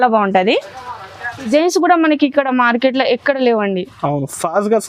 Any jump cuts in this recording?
yes; 1 cut; at 1.5 s

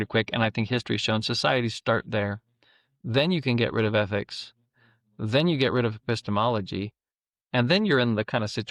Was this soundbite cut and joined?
no; 0 cuts

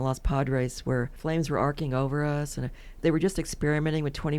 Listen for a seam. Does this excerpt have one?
yes; 2 cuts; at 1.1 s, 3.0 s

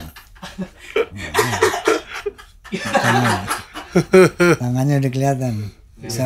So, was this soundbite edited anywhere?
yes; 1 cut; at 4.6 s

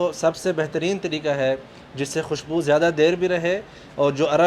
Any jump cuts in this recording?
no; 0 cuts

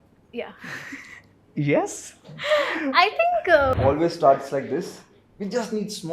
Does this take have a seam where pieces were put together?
yes; 1 cut; at 3.7 s

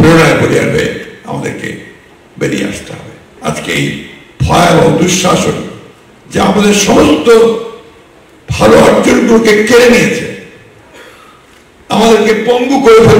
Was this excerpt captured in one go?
no; 1 cut; at 3.3 s

